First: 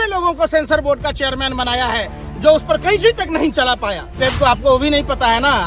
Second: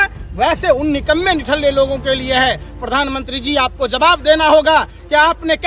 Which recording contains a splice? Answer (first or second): first